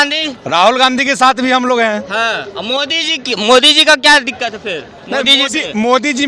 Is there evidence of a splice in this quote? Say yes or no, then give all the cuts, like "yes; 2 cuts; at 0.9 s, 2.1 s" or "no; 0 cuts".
no; 0 cuts